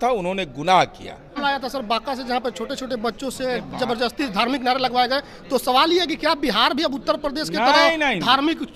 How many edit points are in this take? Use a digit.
1